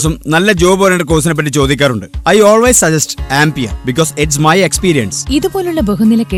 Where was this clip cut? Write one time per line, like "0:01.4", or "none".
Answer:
none